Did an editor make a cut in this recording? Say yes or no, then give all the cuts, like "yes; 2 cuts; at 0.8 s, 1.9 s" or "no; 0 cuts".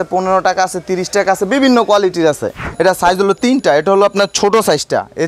yes; 1 cut; at 2.6 s